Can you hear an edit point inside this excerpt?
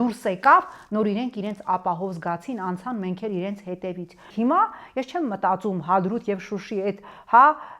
yes; 1 cut; at 4.3 s

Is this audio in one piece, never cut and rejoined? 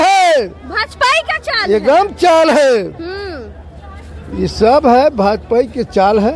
yes; 0 cuts

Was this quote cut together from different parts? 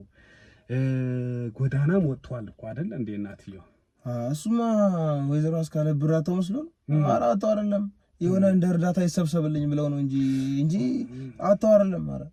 no; 0 cuts

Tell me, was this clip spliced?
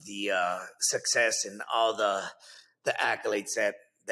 no; 0 cuts

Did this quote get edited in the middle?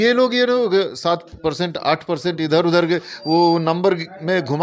no; 0 cuts

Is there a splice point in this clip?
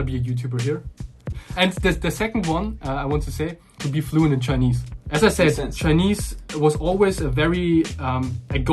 yes; 1 cut; at 1.4 s

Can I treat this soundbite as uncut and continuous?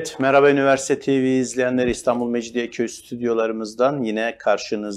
yes; 0 cuts

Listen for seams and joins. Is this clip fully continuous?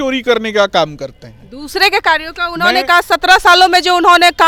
yes; 0 cuts

